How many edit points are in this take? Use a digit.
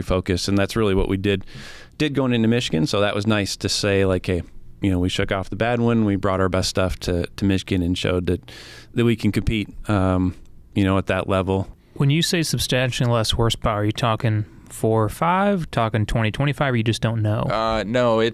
1